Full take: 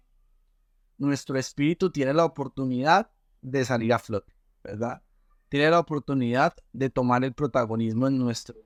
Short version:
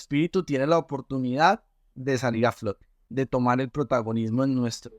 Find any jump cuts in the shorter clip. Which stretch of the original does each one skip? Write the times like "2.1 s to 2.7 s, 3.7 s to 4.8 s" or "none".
4.5 s to 6.6 s

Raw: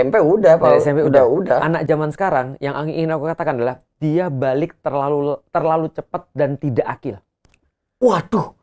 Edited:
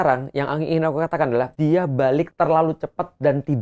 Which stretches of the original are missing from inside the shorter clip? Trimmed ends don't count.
3.8 s to 3.9 s, 4.7 s to 5.5 s

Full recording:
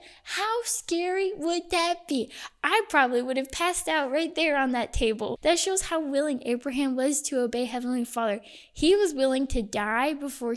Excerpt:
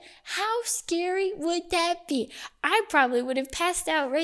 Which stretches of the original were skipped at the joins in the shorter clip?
none

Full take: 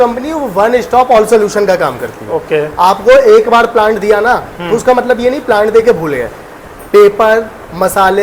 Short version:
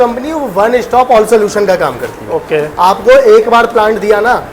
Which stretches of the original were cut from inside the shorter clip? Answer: none

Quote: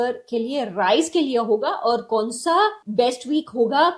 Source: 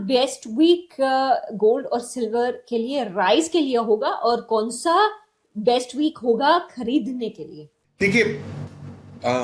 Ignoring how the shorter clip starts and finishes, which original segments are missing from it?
5.2 s to 5.5 s

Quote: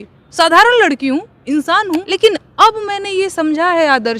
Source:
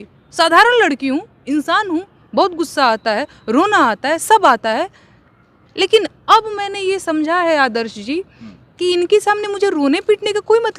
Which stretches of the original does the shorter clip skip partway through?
2.1 s to 5.8 s

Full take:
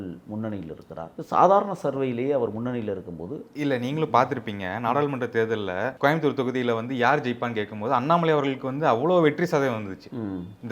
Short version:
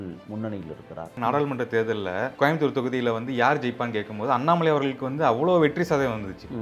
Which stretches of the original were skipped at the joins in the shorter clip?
1.1 s to 4.7 s

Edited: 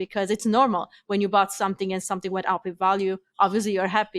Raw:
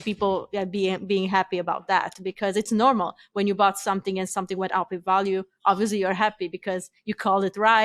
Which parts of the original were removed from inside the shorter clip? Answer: none

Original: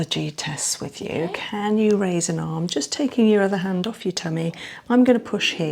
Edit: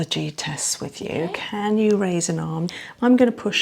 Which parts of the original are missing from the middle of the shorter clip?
2.7 s to 4.6 s

